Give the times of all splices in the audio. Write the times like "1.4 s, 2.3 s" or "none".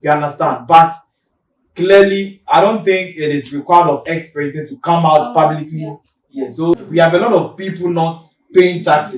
6.7 s